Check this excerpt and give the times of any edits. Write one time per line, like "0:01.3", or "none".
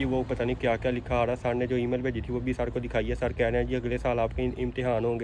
none